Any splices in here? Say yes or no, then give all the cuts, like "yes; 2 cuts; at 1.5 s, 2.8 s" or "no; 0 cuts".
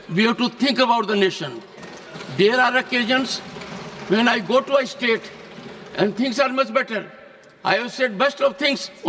no; 0 cuts